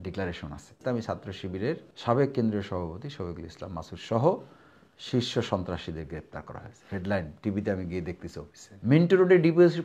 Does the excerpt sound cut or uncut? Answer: cut